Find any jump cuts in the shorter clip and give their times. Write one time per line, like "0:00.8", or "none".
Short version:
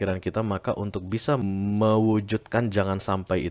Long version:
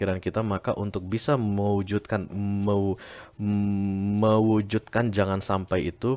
0:01.4